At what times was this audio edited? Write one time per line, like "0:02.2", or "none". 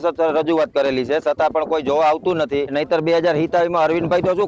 0:02.7